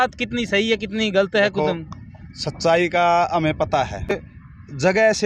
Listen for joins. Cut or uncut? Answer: cut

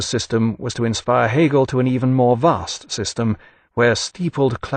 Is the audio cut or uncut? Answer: uncut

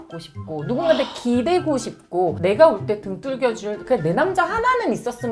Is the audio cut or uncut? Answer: uncut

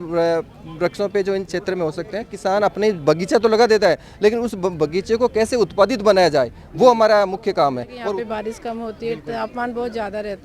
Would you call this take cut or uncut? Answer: cut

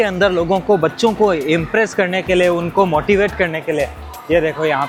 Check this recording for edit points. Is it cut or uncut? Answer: uncut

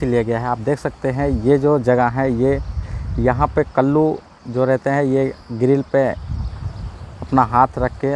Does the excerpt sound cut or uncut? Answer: uncut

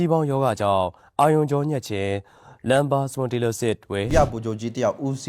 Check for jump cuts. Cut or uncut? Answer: cut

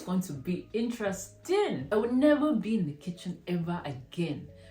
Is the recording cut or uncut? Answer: cut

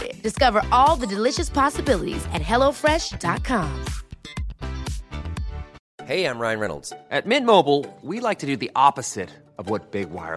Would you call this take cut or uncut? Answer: cut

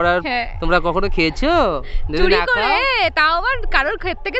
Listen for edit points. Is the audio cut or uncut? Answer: uncut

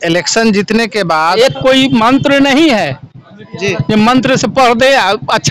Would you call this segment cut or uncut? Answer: cut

